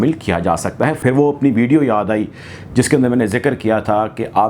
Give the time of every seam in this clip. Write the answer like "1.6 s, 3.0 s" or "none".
1.0 s